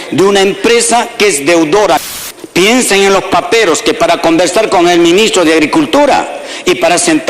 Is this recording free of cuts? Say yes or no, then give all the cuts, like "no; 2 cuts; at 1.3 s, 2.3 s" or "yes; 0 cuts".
no; 1 cut; at 2.0 s